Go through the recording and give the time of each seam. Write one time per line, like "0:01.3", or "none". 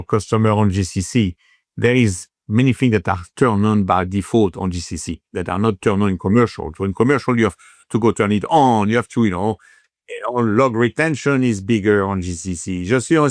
none